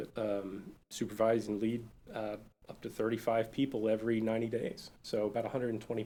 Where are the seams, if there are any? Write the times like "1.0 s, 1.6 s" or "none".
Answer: none